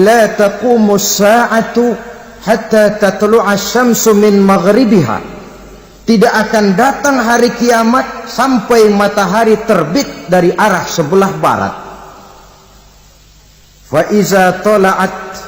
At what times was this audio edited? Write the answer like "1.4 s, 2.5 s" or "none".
none

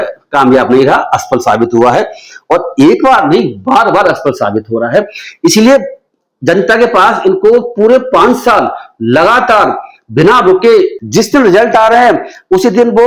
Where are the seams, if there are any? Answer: 11.0 s

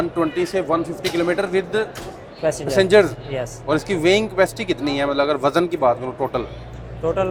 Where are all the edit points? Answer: none

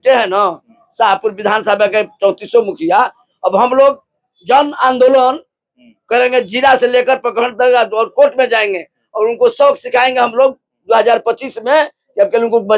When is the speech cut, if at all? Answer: none

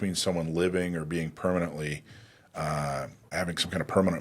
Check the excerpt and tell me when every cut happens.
3.3 s

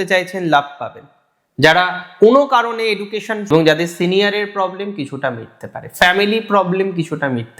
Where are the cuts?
3.5 s

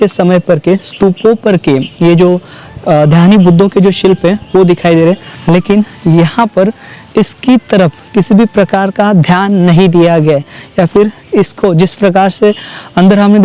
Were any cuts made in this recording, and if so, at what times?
5.3 s

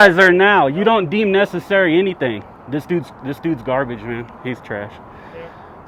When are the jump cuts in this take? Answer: none

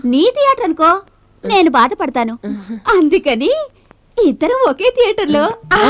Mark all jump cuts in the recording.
none

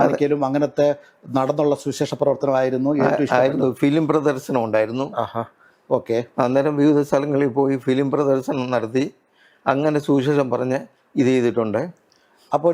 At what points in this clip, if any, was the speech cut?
none

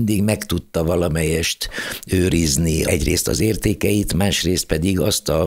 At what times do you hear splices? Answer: 2.9 s

